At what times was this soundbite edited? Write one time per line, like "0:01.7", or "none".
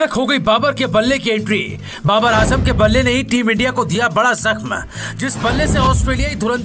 none

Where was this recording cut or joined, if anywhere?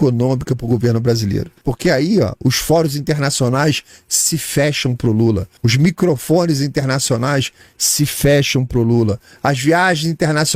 0:01.5
0:05.6

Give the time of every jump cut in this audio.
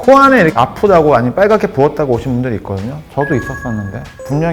0:03.0

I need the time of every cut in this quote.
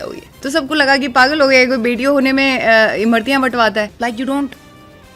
0:03.9

